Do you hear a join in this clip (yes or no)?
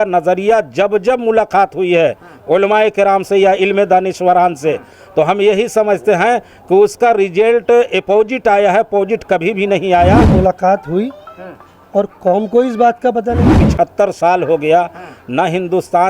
yes